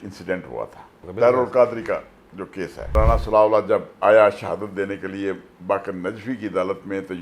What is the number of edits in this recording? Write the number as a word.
two